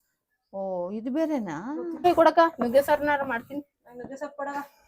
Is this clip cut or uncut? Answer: cut